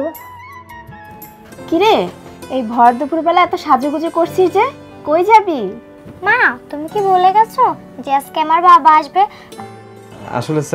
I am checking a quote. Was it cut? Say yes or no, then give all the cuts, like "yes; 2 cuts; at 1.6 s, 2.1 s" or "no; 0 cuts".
yes; 2 cuts; at 1.1 s, 9.6 s